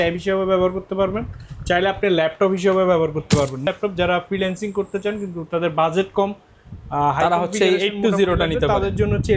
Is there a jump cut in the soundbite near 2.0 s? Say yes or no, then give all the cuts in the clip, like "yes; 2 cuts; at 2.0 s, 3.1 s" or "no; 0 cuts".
no; 1 cut; at 3.7 s